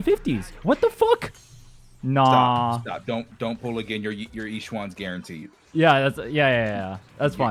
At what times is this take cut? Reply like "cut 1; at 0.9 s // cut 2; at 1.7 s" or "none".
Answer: none